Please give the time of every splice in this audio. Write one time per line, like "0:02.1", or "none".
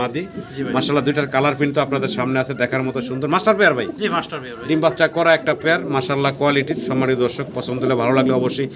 none